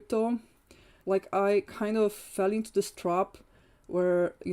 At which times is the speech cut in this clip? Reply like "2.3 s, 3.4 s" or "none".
1.0 s